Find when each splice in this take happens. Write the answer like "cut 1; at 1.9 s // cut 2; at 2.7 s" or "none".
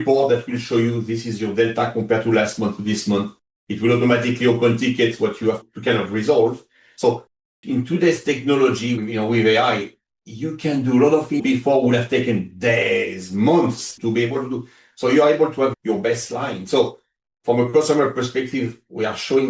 cut 1; at 5.6 s // cut 2; at 9.0 s // cut 3; at 11.4 s // cut 4; at 14.0 s // cut 5; at 15.8 s